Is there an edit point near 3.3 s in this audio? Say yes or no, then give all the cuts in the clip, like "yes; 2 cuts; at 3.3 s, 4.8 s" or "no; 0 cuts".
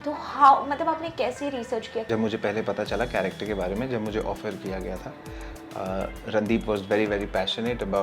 no; 1 cut; at 2.0 s